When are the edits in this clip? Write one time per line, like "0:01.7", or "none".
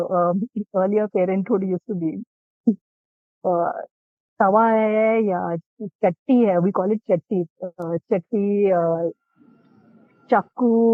none